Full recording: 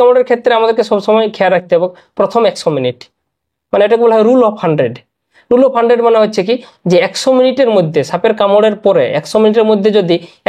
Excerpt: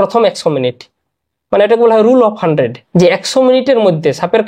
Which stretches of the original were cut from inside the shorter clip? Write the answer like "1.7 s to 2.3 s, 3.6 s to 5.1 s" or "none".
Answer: 5.0 s to 6.7 s